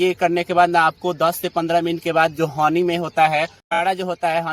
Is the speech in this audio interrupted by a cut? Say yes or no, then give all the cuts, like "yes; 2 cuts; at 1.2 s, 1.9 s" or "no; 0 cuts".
yes; 1 cut; at 3.6 s